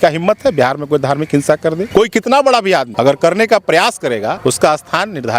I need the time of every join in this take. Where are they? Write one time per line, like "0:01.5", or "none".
0:01.8
0:02.9
0:04.4